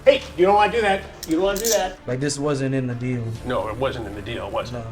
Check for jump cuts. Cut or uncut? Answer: cut